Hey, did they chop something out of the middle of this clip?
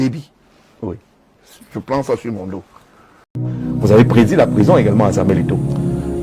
no; 0 cuts

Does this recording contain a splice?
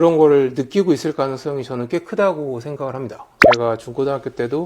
yes; 1 cut; at 3.5 s

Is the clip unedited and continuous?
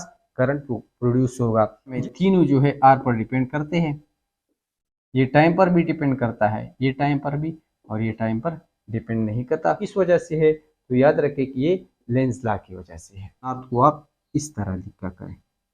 no; 3 cuts; at 2.0 s, 9.8 s, 13.6 s

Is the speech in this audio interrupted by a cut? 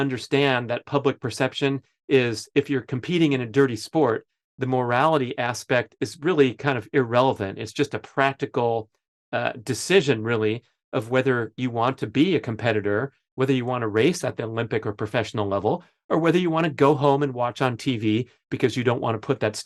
no; 0 cuts

